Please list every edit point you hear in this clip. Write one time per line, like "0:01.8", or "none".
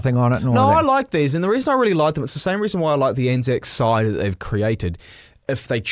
none

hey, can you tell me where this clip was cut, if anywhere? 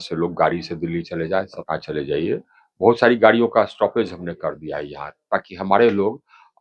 0:01.6

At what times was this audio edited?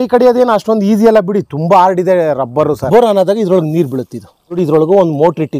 0:02.8
0:04.6

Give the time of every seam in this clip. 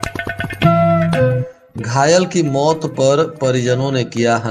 0:01.5

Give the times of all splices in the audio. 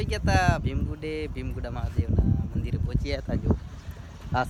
none

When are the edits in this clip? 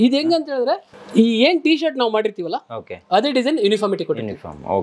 0:01.0

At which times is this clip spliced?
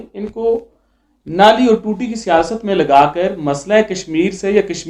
none

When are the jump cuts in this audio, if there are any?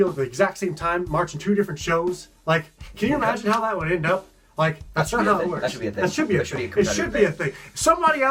none

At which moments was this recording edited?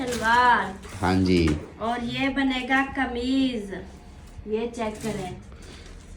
none

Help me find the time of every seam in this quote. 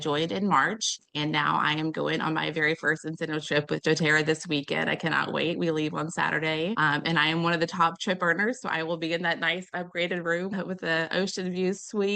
0:01.0
0:06.8
0:10.5

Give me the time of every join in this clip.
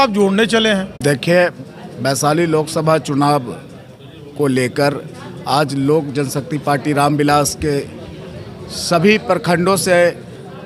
none

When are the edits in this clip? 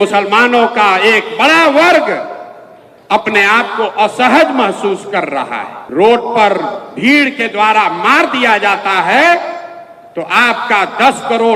0:05.8

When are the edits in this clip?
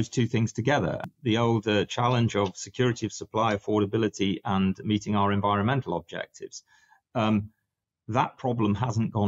0:01.0

